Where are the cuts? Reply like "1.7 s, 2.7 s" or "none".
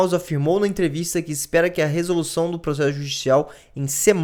none